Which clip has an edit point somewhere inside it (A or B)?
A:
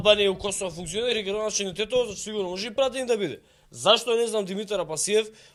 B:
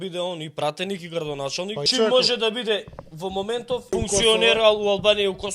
B